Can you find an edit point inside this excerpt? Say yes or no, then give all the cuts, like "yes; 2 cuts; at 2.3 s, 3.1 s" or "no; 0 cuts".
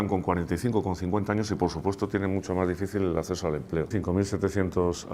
yes; 1 cut; at 3.9 s